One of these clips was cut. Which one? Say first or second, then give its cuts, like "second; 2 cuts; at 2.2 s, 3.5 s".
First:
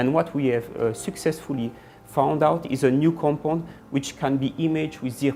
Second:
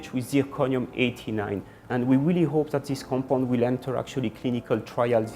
second; 1 cut; at 1.8 s